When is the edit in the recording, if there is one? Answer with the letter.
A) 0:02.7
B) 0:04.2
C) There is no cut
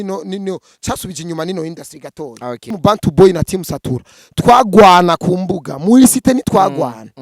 A